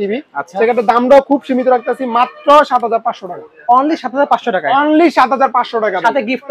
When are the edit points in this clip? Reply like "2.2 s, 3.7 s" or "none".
none